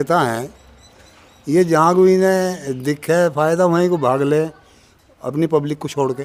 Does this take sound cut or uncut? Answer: uncut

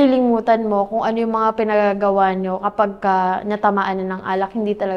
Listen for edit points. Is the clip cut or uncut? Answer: uncut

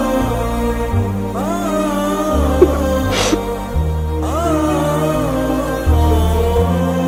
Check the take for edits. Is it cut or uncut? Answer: uncut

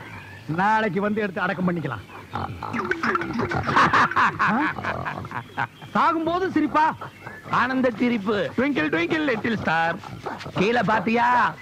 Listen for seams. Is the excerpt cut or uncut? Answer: cut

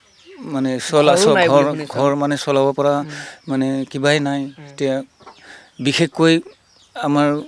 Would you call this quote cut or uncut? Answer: uncut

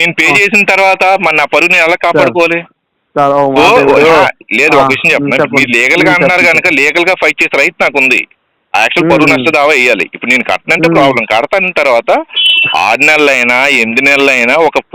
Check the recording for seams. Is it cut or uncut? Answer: uncut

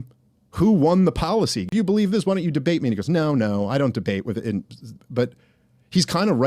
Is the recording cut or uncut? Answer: cut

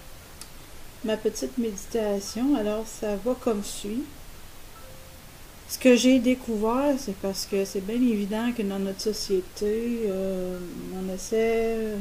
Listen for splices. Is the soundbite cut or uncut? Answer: cut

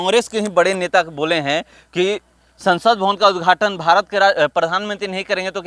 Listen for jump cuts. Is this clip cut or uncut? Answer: uncut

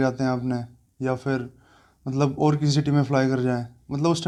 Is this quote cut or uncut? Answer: uncut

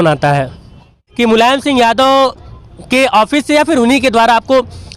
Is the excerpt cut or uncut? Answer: cut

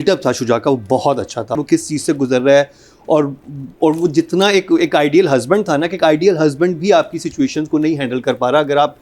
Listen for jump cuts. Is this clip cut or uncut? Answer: cut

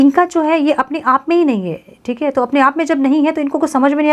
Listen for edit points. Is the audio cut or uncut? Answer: uncut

